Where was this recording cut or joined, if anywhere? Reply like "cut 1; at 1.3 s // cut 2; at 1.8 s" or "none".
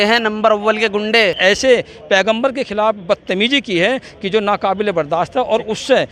cut 1; at 1.4 s